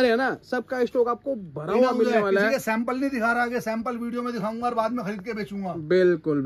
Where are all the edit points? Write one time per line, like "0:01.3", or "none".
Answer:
none